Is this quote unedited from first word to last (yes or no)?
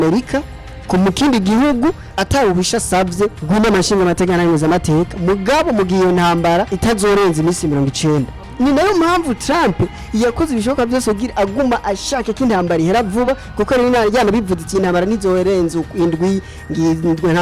no